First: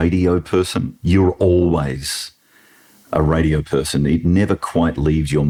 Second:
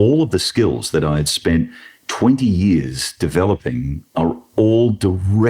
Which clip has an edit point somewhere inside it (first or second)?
second